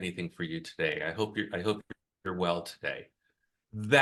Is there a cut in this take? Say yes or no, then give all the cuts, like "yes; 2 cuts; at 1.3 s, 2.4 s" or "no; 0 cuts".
no; 0 cuts